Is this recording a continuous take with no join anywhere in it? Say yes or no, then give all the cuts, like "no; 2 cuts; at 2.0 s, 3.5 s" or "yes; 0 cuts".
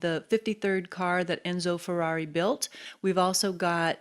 no; 1 cut; at 2.8 s